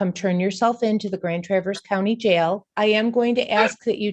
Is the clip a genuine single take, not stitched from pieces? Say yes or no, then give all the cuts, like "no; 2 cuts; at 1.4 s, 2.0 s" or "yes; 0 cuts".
no; 1 cut; at 2.7 s